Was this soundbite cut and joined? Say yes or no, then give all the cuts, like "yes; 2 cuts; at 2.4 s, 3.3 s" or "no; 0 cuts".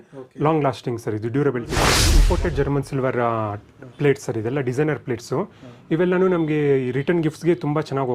yes; 1 cut; at 2.1 s